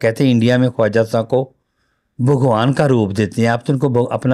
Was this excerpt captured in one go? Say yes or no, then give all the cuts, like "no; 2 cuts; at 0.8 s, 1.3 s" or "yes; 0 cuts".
yes; 0 cuts